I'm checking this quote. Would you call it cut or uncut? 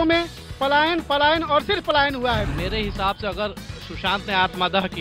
cut